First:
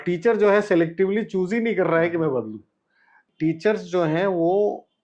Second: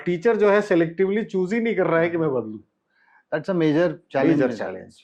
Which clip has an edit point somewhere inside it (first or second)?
first